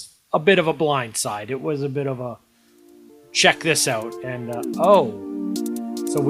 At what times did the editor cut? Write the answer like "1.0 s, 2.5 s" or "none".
none